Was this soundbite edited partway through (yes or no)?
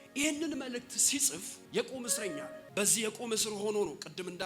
yes